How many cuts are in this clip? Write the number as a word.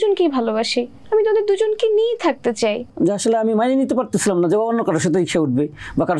two